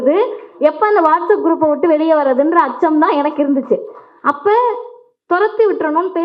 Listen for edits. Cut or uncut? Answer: uncut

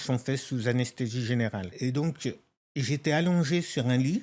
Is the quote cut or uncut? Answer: cut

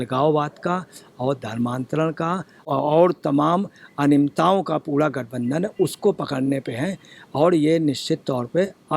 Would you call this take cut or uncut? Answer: cut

